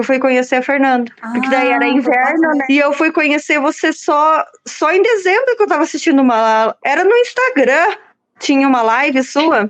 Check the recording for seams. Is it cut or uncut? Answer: uncut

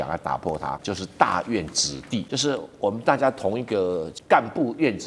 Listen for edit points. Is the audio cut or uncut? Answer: cut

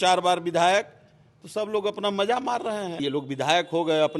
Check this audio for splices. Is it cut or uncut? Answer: cut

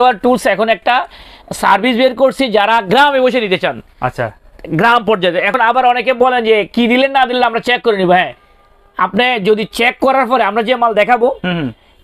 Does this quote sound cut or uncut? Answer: uncut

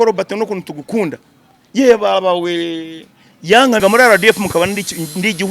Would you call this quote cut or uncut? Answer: cut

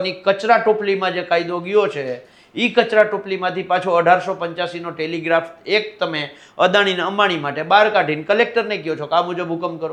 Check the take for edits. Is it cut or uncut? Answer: uncut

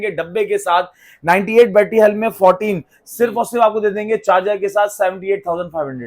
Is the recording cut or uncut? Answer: uncut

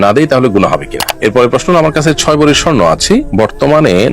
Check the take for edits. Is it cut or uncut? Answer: cut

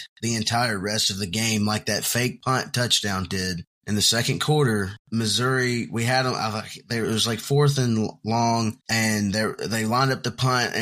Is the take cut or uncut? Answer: cut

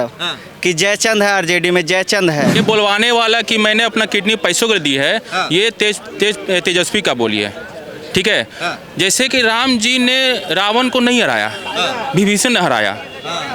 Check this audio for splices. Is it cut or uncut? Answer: cut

